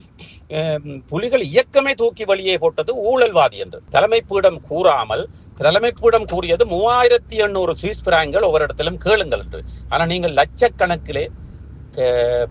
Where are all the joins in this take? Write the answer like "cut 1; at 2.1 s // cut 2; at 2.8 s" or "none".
cut 1; at 3.8 s